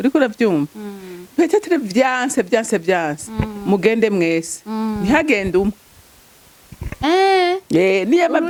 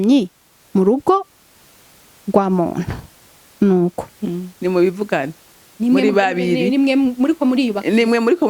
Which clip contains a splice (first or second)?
second